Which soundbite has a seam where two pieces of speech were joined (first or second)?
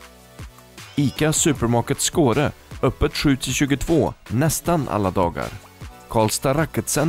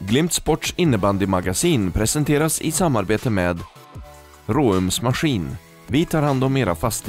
first